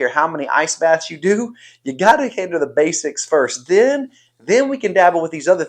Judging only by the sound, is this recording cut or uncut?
uncut